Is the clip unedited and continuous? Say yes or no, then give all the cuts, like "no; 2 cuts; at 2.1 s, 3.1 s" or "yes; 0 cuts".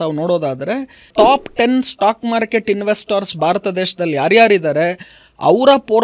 no; 1 cut; at 1.1 s